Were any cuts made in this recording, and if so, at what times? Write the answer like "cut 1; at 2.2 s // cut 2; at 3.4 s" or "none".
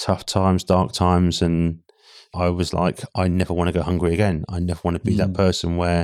cut 1; at 2.3 s